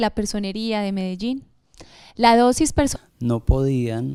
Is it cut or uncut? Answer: uncut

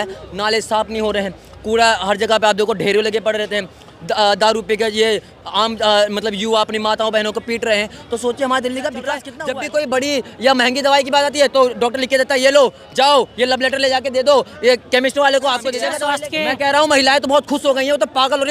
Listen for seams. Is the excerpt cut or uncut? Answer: cut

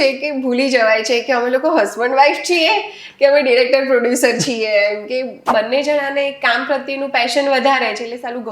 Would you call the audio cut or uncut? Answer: cut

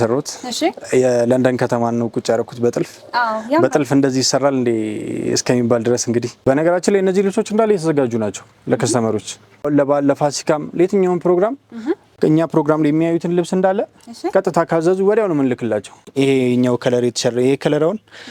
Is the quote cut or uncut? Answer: cut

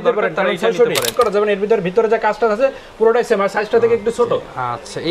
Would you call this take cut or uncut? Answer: cut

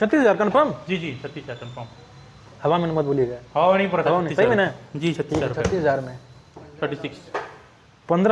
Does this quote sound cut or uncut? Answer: uncut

